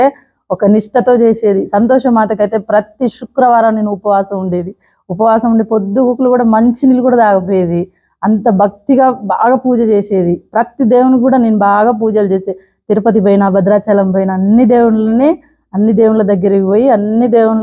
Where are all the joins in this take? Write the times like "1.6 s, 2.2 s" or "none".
none